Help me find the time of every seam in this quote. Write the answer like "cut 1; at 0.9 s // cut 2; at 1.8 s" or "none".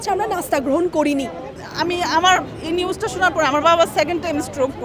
cut 1; at 1.6 s